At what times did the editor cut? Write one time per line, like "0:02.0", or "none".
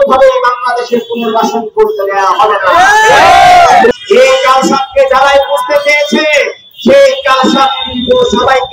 0:03.9